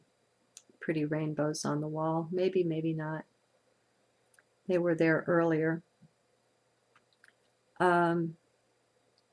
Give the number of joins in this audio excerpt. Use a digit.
0